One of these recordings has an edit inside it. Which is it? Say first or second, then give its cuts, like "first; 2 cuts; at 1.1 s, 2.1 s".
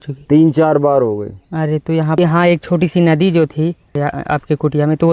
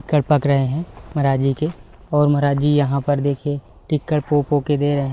first; 2 cuts; at 2.2 s, 3.9 s